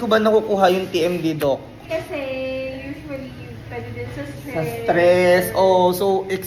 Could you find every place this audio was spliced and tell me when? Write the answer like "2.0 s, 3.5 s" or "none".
none